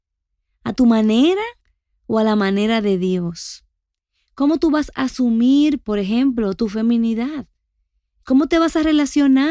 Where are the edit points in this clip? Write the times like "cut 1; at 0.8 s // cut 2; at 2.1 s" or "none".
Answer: cut 1; at 8.2 s